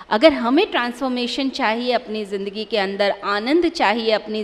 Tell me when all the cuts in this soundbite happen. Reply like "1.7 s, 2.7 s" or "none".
none